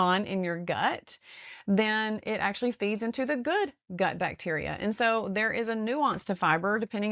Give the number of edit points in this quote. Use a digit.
0